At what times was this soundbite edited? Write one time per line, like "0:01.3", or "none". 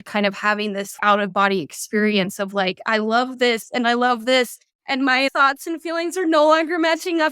0:00.9
0:05.3